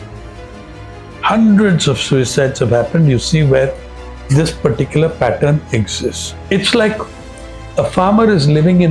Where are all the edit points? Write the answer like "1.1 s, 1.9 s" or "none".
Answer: 6.5 s